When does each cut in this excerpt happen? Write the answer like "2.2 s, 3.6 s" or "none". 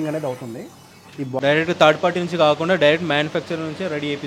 1.4 s